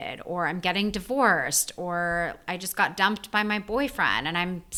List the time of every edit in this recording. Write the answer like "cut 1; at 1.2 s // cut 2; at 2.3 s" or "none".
none